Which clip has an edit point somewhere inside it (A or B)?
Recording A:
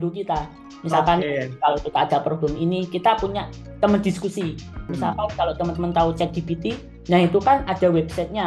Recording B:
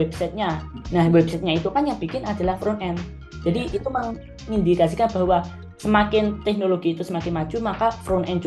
A